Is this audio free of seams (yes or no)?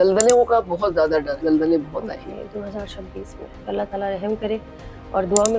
no